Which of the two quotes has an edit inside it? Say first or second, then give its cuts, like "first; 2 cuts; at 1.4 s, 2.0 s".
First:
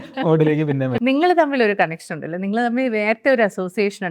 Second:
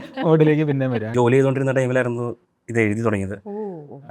second; 1 cut; at 1.0 s